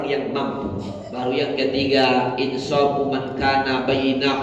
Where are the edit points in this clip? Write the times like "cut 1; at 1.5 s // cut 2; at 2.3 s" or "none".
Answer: cut 1; at 1.1 s